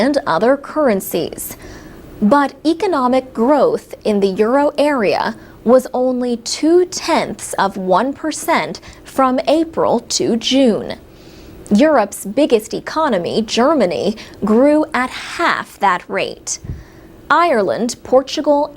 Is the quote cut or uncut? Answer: cut